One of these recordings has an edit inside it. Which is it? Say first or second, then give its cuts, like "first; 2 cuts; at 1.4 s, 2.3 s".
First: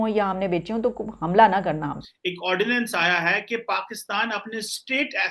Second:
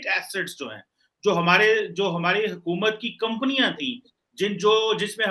first; 1 cut; at 2.1 s